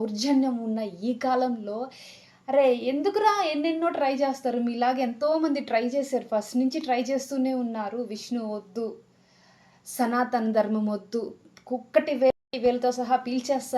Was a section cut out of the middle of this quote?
yes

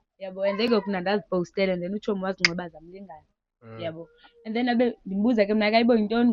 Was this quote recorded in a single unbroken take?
yes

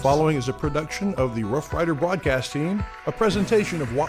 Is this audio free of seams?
yes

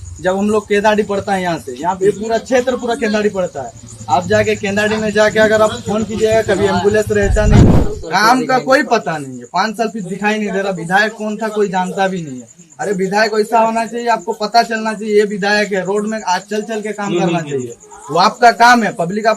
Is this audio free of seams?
no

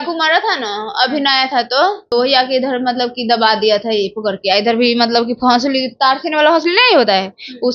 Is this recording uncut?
no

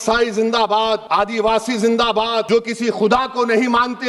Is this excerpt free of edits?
no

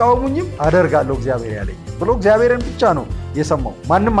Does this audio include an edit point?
no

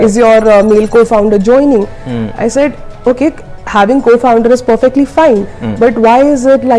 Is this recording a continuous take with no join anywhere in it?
yes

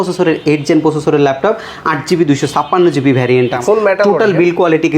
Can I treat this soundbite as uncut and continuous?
no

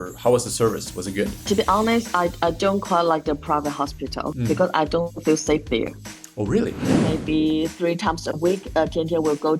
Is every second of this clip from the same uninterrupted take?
no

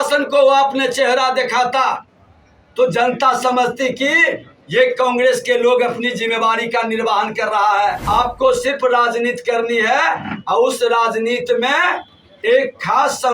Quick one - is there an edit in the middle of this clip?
yes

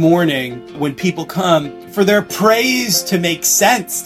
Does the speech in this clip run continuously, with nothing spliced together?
yes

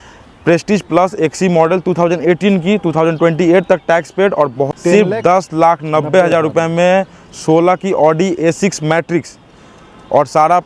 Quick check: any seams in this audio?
yes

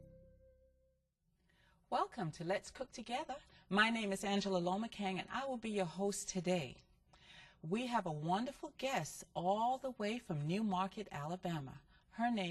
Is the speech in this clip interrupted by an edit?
no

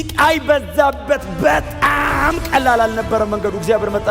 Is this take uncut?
yes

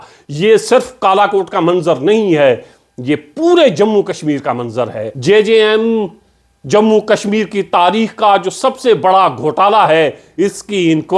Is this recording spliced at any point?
yes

